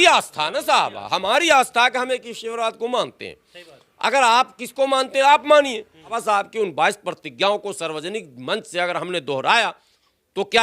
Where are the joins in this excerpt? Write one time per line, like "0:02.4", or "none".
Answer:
0:06.2